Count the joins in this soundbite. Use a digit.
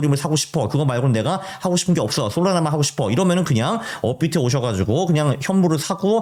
0